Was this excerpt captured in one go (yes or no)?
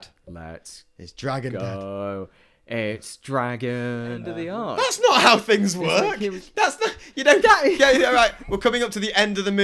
no